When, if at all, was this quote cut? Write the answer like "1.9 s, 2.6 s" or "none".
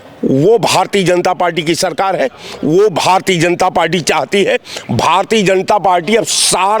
none